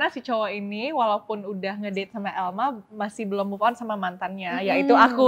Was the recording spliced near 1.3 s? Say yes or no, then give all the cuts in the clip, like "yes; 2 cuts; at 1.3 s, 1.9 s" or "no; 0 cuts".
no; 0 cuts